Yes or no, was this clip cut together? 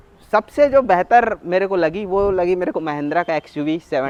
no